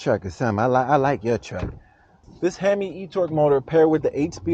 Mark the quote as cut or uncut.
cut